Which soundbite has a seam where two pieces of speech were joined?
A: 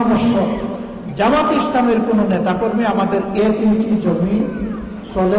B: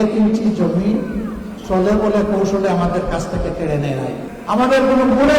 B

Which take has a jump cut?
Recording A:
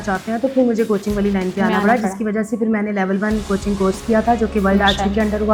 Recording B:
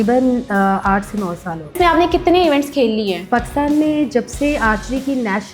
B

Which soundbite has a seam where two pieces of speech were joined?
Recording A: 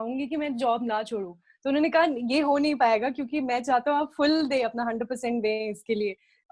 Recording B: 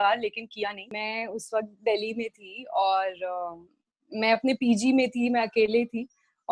B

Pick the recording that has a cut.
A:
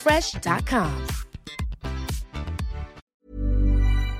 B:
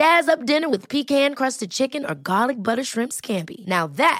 A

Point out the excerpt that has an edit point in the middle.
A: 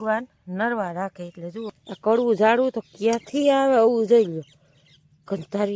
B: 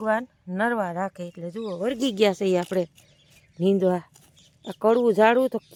A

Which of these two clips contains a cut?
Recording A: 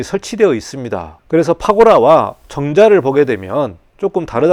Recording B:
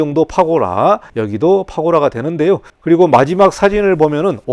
B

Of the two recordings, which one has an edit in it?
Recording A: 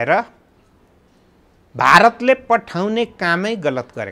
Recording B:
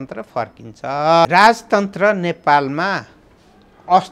B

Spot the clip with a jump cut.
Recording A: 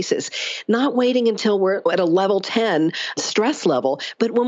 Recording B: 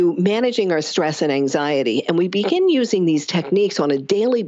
A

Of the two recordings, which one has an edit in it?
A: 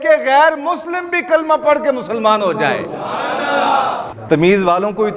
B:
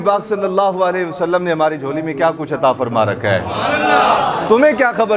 A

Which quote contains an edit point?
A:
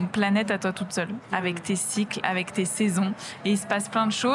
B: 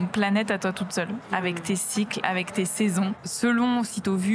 B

